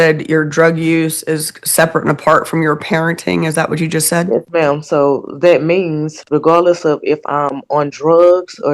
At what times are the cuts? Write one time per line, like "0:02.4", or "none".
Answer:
none

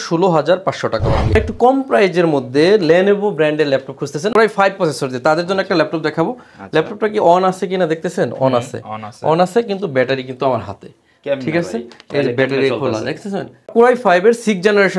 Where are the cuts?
0:01.3
0:13.7

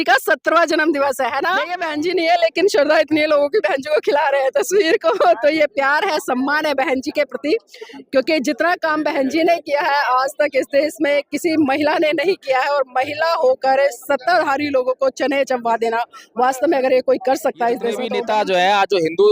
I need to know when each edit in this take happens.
0:01.8
0:18.1

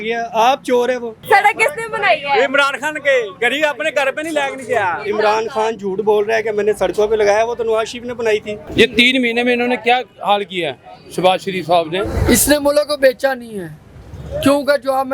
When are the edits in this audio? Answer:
0:01.2
0:05.0
0:08.6
0:12.1

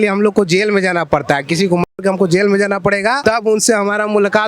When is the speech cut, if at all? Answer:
0:03.2

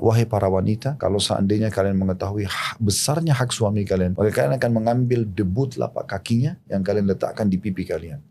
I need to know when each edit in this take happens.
0:00.9
0:04.1

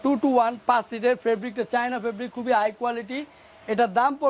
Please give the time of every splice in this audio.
none

